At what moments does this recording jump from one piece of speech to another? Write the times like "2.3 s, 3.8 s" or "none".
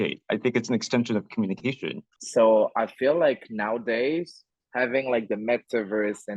2.1 s